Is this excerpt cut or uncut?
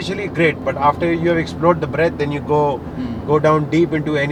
uncut